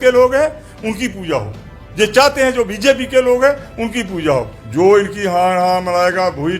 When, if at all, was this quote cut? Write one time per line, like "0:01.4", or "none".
0:04.6